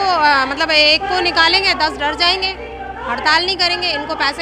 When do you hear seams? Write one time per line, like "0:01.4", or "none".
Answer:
none